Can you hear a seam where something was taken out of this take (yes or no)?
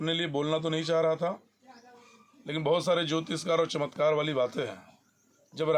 no